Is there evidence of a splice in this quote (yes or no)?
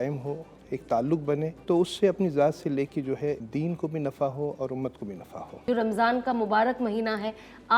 yes